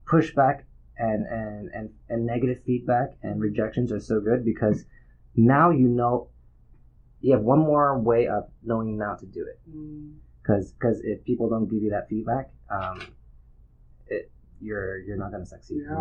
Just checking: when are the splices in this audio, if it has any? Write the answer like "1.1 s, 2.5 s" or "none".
none